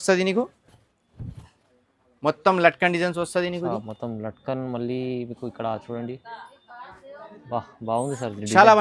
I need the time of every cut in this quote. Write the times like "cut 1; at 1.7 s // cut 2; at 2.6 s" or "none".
none